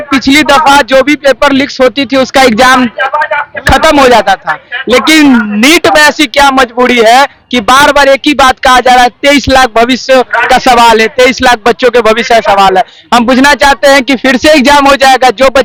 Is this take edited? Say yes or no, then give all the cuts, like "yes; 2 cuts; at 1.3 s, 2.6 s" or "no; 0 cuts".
no; 0 cuts